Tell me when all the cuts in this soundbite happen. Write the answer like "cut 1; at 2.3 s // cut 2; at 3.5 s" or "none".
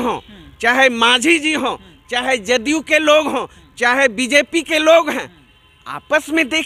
none